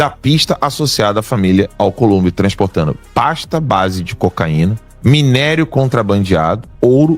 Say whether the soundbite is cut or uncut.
cut